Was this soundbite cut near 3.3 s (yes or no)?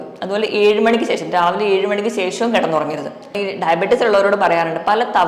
yes